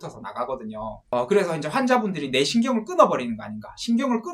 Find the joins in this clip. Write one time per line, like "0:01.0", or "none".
0:01.1